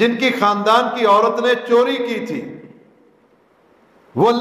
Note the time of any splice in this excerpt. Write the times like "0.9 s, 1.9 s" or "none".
none